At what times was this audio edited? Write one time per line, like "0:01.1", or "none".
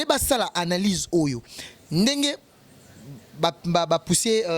none